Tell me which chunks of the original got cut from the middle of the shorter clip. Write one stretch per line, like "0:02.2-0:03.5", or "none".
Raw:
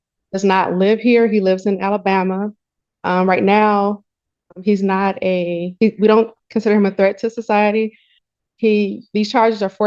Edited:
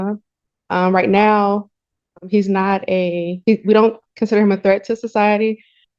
none